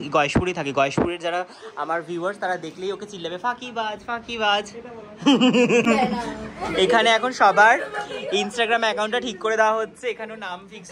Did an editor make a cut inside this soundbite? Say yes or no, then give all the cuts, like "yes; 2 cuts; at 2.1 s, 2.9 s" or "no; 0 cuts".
yes; 1 cut; at 5.8 s